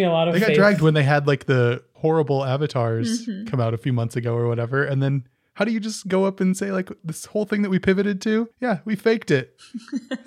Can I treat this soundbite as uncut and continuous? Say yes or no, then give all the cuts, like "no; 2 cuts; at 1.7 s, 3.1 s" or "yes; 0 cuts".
no; 4 cuts; at 1.9 s, 3.8 s, 7.1 s, 8.5 s